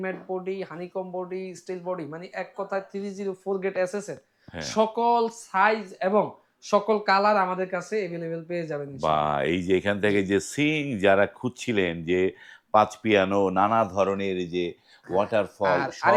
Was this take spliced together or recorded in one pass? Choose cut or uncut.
uncut